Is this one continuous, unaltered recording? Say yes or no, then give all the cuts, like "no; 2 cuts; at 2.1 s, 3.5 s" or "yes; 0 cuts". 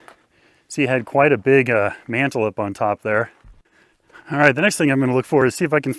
no; 1 cut; at 3.4 s